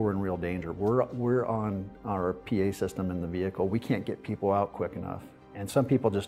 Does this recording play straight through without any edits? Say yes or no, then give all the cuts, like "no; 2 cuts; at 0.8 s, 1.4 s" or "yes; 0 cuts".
yes; 0 cuts